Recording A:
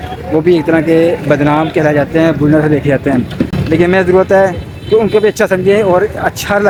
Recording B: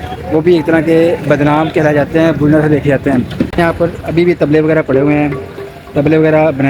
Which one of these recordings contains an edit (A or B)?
B